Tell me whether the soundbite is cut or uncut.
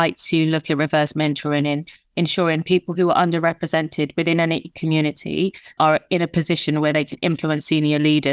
cut